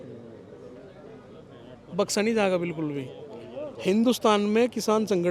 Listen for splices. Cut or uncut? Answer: cut